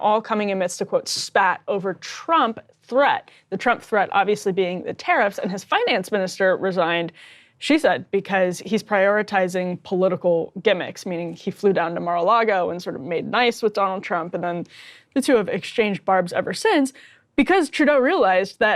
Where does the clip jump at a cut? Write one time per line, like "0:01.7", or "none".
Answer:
none